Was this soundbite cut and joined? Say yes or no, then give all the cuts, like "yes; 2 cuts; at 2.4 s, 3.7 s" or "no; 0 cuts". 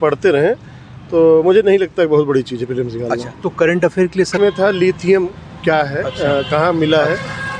yes; 1 cut; at 4.4 s